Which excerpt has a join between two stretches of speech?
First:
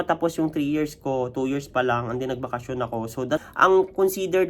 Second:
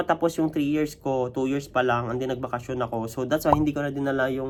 first; 1 cut; at 3.4 s

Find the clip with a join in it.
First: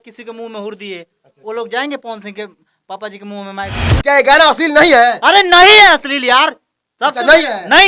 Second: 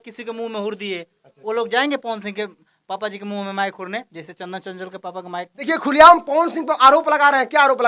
first; 1 cut; at 3.8 s

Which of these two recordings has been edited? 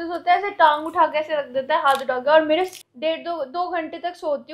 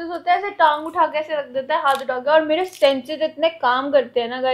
first; 1 cut; at 2.7 s

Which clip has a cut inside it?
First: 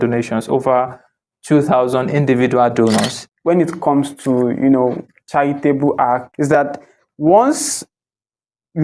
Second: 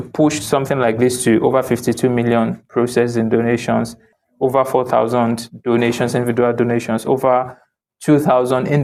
first; 2 cuts; at 3.2 s, 6.3 s

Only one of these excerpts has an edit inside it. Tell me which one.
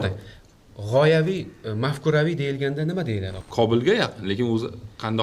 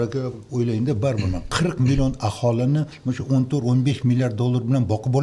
first; 1 cut; at 3.3 s

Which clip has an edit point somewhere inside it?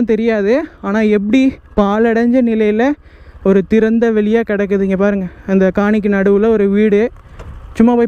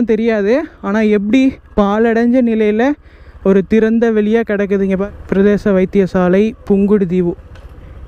second; 1 cut; at 5.0 s

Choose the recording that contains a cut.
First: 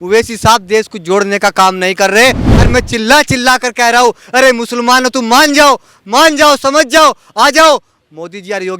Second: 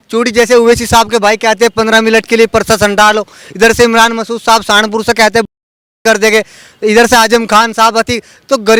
first; 1 cut; at 2.5 s

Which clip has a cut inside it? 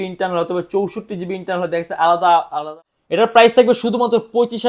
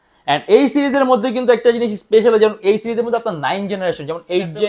first; 1 cut; at 2.6 s

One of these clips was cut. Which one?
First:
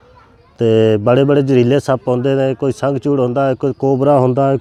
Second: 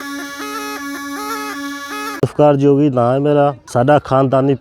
second; 2 cuts; at 2.2 s, 3.6 s

